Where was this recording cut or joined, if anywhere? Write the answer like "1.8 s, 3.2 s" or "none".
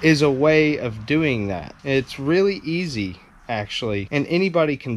1.7 s, 4.1 s